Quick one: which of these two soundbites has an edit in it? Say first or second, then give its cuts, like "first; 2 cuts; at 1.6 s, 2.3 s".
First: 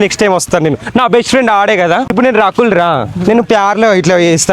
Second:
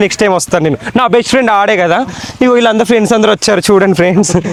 first; 1 cut; at 2.2 s